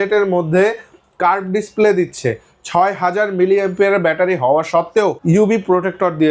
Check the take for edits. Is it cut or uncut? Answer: cut